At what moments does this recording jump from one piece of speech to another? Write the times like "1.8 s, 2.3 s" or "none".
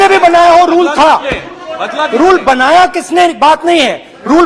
none